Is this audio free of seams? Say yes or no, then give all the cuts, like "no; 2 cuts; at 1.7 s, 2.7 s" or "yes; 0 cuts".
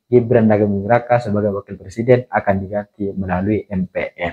yes; 0 cuts